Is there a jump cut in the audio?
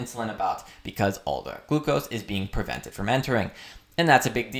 no; 0 cuts

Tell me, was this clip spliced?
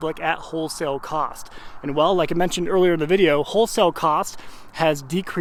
no; 0 cuts

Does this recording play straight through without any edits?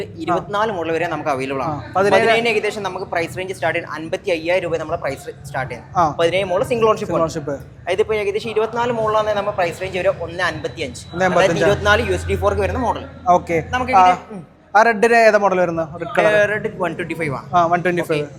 yes; 0 cuts

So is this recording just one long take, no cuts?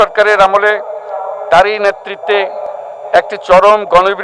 yes; 0 cuts

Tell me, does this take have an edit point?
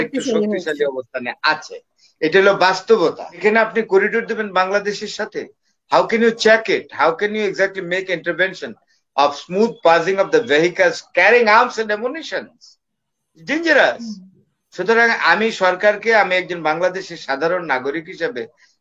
yes; 1 cut; at 3.4 s

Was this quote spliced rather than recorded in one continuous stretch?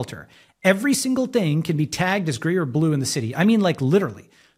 no; 0 cuts

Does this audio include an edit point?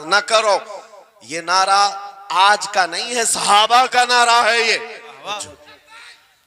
yes; 1 cut; at 5.4 s

